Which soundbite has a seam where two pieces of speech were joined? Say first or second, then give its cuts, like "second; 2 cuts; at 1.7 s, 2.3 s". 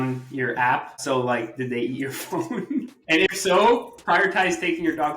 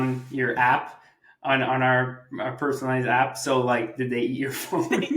first; 2 cuts; at 1.0 s, 2.9 s